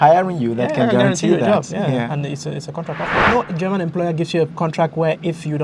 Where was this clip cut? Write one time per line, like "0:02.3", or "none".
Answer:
0:03.2